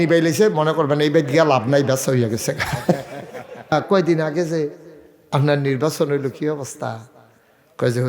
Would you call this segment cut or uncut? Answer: cut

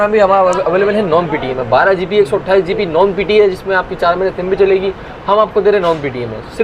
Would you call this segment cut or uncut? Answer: uncut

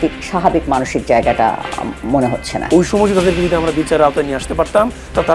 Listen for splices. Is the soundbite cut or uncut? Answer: cut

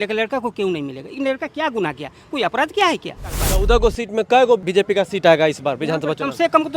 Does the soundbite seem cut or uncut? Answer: cut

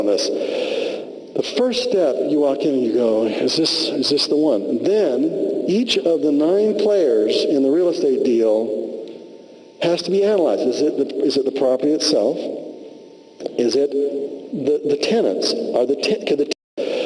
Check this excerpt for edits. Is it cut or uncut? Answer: uncut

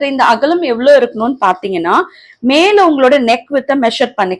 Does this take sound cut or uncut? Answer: uncut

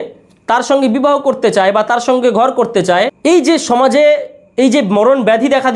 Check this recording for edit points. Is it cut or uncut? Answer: cut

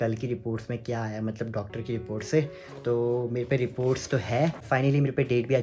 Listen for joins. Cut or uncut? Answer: cut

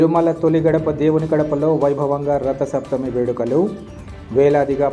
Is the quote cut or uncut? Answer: uncut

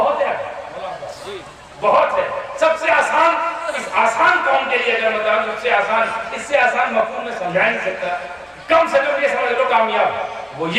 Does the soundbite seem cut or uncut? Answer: uncut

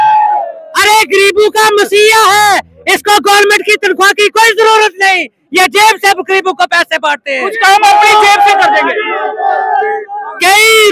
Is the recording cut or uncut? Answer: uncut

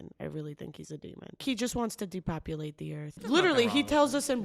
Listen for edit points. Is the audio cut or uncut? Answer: cut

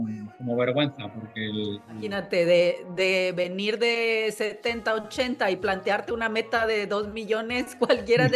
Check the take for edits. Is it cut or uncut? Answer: cut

